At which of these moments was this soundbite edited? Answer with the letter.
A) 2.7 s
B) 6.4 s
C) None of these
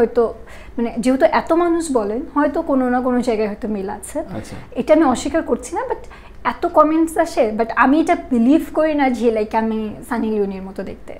C